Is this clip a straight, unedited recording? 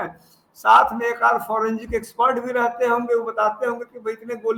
yes; 0 cuts

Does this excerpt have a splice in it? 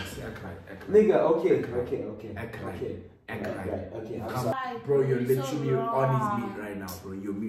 yes; 1 cut; at 4.6 s

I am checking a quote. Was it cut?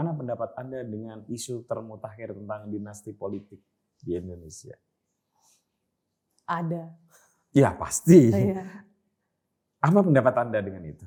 no; 0 cuts

